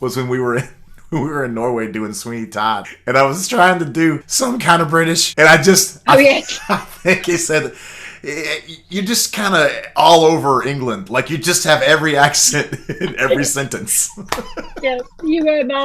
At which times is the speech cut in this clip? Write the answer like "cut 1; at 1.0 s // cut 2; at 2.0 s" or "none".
cut 1; at 2.9 s // cut 2; at 4.3 s // cut 3; at 5.3 s